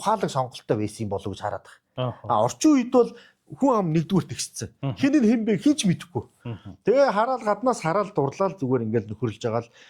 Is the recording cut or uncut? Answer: uncut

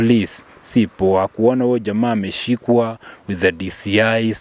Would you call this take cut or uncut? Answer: uncut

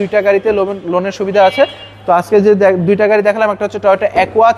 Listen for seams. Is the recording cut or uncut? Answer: uncut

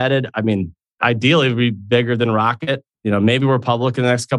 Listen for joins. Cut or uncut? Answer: cut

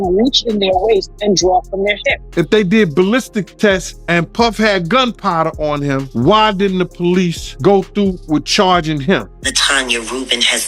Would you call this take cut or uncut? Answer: cut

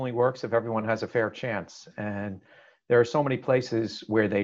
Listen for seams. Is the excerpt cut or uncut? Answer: uncut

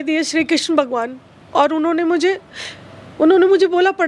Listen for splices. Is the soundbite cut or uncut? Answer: uncut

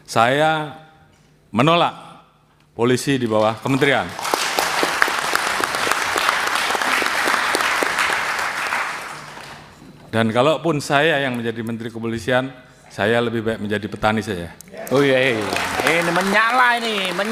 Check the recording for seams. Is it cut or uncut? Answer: uncut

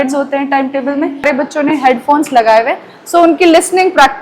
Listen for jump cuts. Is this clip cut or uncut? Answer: cut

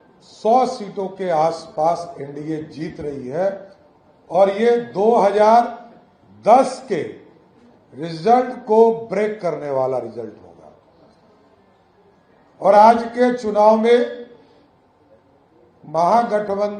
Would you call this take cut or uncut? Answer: uncut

